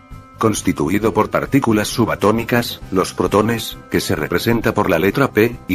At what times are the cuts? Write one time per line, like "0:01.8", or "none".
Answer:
0:04.6